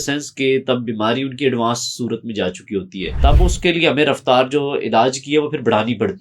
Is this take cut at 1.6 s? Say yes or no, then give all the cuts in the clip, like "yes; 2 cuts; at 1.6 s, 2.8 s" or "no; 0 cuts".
no; 1 cut; at 3.1 s